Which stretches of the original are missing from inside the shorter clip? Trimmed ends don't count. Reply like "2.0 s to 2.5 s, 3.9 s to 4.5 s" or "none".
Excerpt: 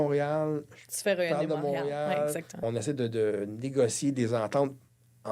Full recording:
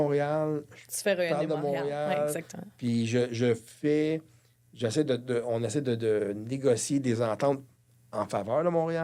2.6 s to 5.5 s